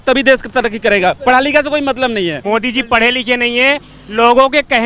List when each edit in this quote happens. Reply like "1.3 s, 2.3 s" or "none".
2.4 s